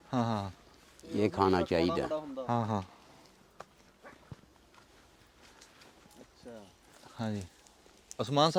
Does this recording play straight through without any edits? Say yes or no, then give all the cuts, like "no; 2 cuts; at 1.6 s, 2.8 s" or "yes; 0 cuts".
yes; 0 cuts